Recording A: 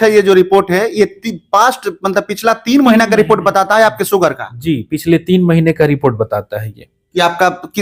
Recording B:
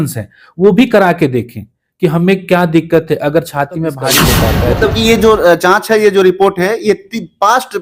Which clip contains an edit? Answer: B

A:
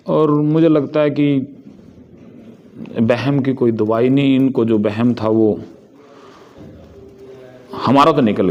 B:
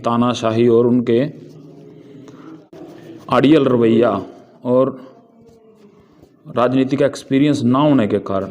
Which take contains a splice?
B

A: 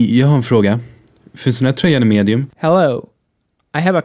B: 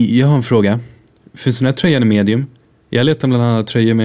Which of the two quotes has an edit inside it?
B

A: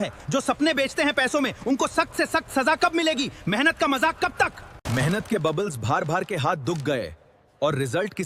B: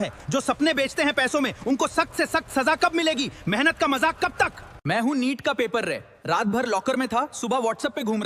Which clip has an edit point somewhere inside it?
A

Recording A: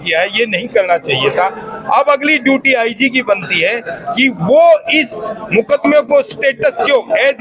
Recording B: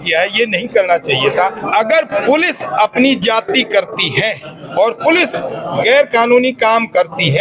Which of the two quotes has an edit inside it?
B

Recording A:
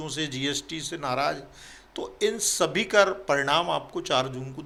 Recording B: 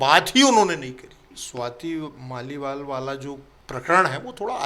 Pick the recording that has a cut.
B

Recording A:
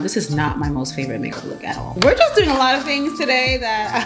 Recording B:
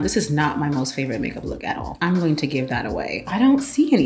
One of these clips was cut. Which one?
A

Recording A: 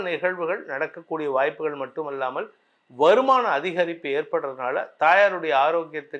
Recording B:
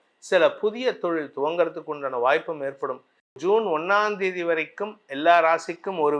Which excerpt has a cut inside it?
B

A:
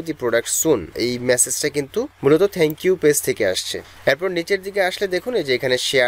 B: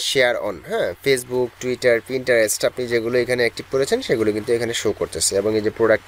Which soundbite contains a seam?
A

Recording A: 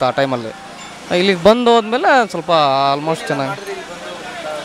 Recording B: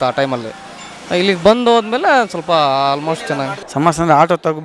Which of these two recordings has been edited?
B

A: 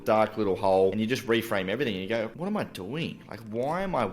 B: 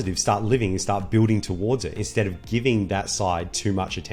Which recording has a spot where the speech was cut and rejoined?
A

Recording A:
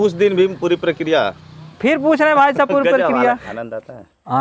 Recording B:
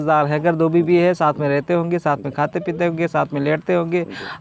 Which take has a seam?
A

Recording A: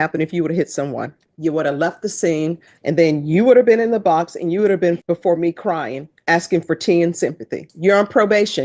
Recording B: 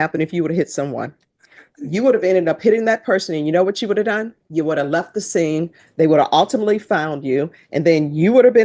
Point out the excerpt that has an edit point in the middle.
A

